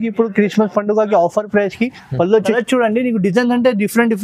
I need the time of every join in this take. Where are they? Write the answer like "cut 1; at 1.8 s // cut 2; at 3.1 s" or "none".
cut 1; at 2.5 s